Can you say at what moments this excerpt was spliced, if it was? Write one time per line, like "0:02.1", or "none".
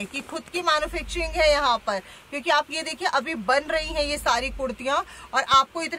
none

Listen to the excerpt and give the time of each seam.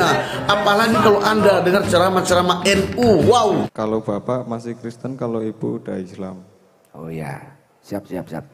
0:03.7

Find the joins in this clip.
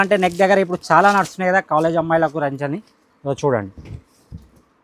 none

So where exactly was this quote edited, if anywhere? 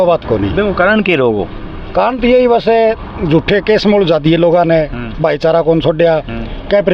none

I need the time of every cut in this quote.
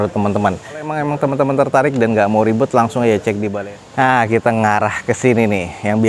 0:00.9
0:03.5

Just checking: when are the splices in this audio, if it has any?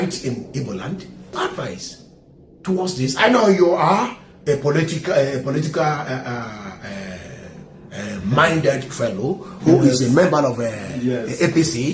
0:01.4

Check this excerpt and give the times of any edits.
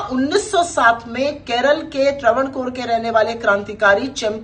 none

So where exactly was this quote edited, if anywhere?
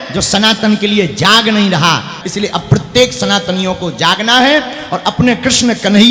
0:02.2

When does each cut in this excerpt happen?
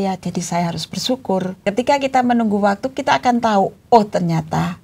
0:01.6

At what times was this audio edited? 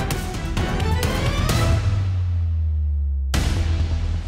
none

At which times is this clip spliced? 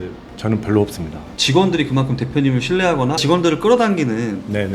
0:01.2

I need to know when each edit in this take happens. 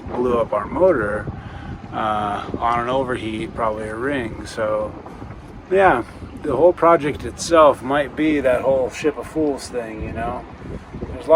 none

